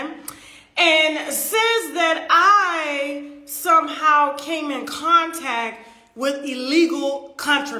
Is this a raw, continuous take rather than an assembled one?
yes; 0 cuts

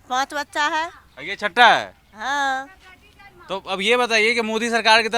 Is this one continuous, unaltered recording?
yes; 0 cuts

